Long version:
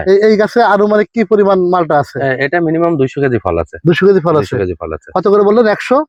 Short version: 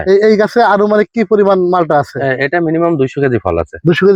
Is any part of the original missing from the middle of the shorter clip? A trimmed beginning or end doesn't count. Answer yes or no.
no